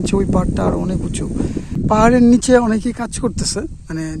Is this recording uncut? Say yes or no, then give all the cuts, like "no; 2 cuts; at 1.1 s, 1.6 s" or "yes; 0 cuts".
no; 1 cut; at 1.8 s